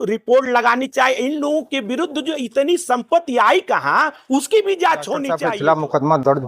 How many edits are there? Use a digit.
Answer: 1